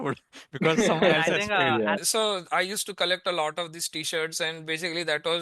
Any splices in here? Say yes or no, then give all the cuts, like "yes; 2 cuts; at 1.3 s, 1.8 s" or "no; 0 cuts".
yes; 1 cut; at 2.1 s